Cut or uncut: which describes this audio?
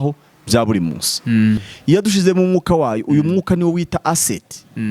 cut